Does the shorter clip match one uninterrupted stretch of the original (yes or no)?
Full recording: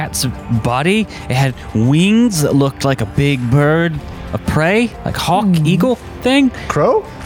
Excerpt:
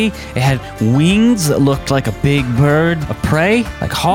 no